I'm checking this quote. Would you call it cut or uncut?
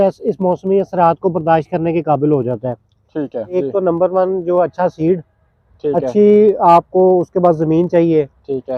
cut